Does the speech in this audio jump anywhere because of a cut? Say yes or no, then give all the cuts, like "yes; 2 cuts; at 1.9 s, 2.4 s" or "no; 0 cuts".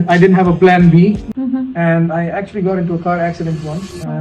yes; 1 cut; at 1.3 s